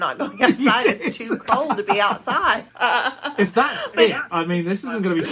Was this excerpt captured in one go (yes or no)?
no